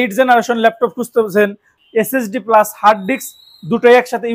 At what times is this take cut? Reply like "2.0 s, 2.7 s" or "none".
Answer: 1.7 s

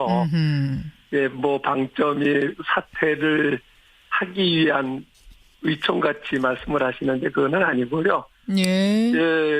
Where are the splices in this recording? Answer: 1.2 s

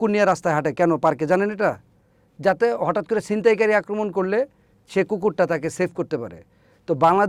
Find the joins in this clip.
none

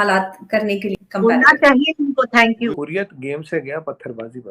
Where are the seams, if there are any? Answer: 2.7 s

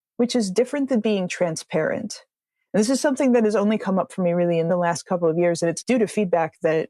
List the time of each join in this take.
none

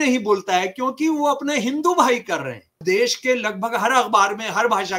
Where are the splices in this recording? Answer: 2.8 s

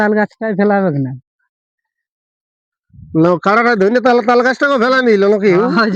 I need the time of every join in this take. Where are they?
none

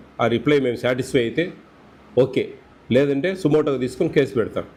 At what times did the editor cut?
none

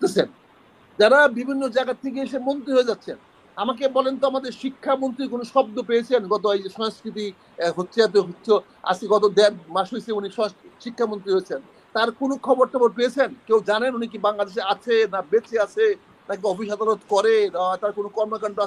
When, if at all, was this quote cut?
none

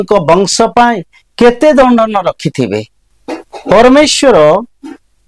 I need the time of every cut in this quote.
3.2 s

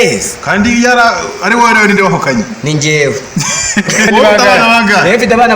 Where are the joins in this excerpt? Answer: 4.1 s

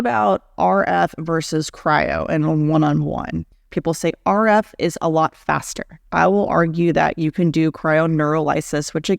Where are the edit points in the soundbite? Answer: 3.6 s, 6.0 s

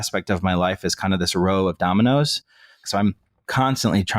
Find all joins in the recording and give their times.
2.8 s

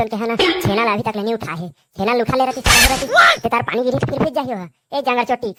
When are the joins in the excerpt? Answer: none

